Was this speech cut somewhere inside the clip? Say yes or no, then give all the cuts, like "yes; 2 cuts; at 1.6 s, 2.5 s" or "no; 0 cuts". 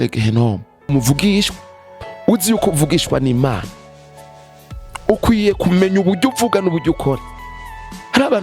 yes; 1 cut; at 0.9 s